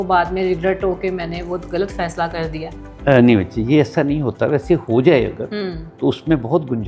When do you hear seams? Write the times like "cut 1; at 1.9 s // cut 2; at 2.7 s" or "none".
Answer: none